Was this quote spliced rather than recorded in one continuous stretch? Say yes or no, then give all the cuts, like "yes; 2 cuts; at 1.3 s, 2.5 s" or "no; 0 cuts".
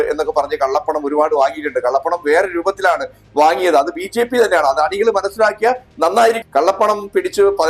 yes; 1 cut; at 6.4 s